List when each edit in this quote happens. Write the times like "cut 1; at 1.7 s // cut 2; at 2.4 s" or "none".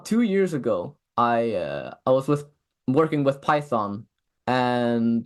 none